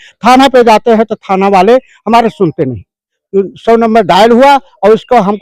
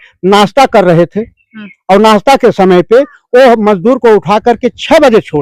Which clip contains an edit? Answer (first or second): first